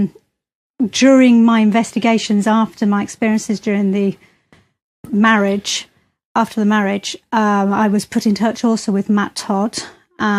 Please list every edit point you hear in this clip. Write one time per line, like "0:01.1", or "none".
0:04.9